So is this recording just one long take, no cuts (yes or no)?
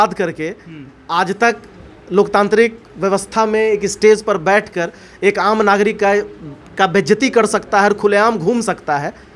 yes